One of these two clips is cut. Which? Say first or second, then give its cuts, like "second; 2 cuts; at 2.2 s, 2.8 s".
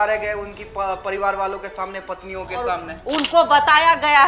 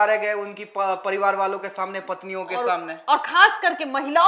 first; 1 cut; at 2.9 s